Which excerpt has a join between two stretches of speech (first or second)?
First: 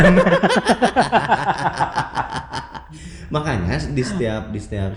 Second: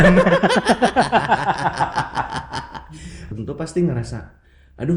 second